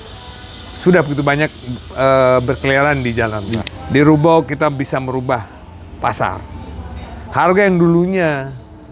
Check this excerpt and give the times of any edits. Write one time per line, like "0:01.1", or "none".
0:03.6